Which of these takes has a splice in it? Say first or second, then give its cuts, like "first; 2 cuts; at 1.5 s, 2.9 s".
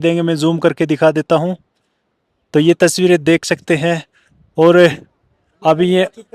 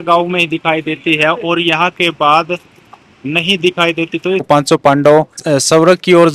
second; 2 cuts; at 4.5 s, 5.4 s